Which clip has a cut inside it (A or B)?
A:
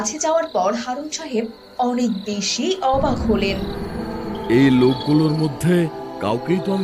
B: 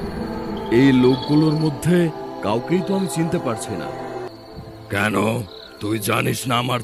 B